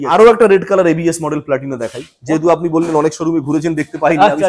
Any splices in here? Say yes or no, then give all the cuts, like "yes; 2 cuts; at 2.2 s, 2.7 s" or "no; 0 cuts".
no; 0 cuts